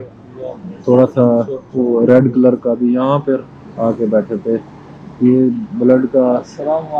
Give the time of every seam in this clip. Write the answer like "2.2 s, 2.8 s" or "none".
none